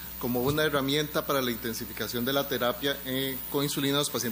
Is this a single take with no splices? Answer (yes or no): yes